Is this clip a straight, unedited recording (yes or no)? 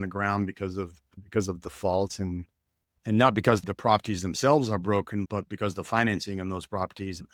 yes